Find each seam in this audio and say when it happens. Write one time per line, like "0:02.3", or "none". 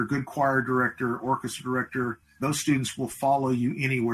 0:02.4